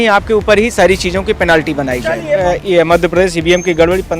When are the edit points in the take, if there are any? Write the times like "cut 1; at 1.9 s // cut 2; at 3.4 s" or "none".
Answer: cut 1; at 2.4 s